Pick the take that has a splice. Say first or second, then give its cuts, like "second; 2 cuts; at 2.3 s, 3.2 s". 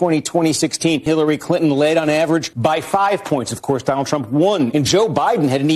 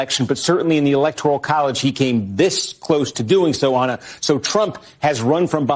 first; 3 cuts; at 1.1 s, 2.5 s, 4.7 s